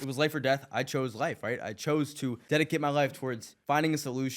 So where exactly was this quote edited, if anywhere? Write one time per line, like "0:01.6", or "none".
0:02.4
0:03.5